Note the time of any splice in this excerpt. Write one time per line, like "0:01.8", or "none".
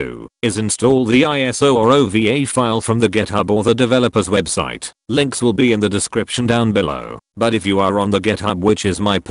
none